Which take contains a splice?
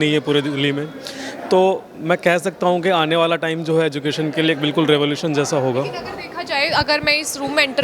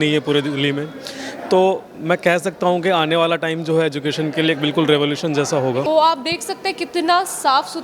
second; 1 cut; at 5.8 s

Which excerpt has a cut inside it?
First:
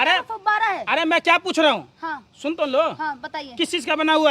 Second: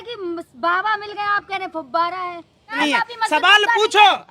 second; 1 cut; at 2.8 s

